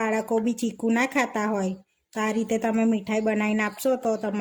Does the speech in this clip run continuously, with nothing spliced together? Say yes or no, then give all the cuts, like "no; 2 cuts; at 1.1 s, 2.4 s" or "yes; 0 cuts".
yes; 0 cuts